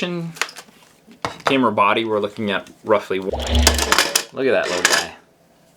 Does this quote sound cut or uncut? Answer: cut